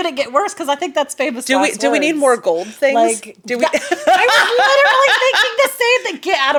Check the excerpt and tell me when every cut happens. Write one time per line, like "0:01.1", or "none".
none

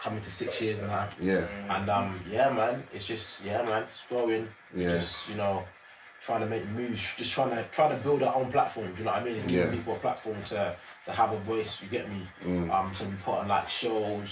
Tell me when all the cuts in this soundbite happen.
none

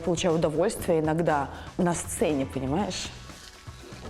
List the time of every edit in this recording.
0:01.6

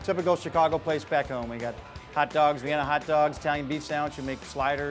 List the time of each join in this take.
none

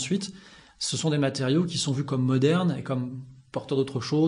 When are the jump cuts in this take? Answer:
0:02.8

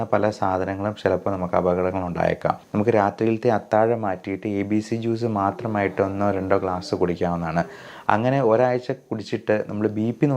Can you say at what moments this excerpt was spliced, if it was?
0:02.6

